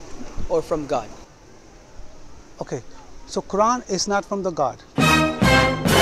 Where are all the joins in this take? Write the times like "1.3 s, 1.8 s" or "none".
4.8 s